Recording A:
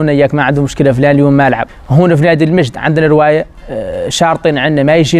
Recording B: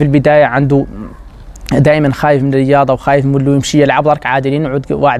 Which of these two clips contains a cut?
A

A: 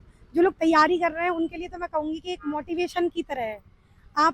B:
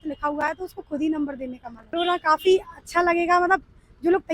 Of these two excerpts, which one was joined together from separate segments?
B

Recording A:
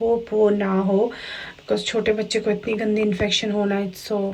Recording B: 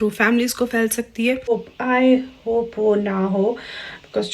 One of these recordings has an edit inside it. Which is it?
B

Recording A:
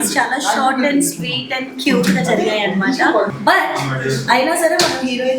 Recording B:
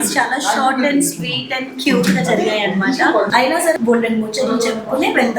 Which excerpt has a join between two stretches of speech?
B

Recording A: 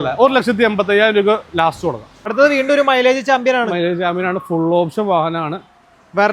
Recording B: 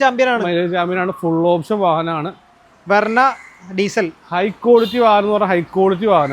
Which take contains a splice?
A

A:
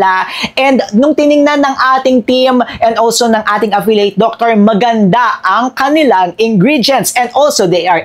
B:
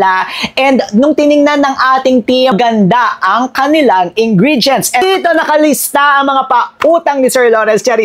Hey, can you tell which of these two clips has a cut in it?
B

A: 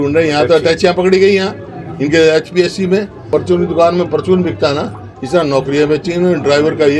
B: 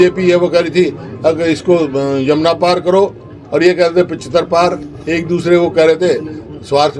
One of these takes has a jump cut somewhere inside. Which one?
A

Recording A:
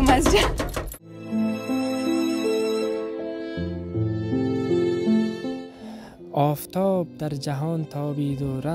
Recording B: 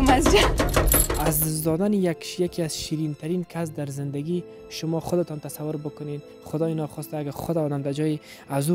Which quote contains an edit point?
B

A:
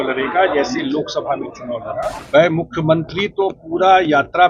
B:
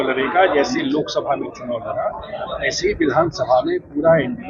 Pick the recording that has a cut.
A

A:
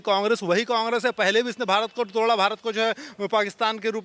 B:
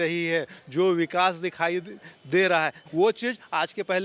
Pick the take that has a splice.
B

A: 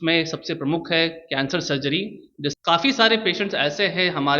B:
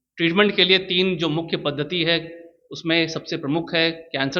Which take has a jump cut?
A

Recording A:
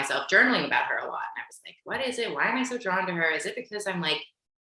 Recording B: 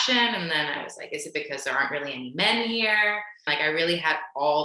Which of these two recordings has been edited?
B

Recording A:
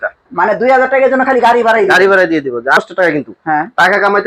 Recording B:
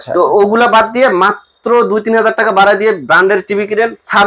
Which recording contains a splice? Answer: A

